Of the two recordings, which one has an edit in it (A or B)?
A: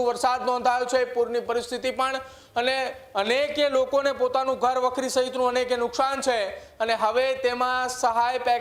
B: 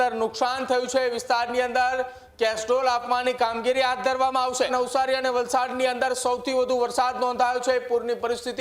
B